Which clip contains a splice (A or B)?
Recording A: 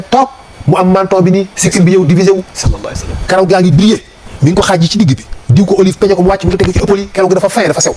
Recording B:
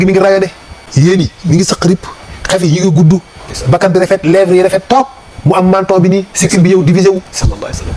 B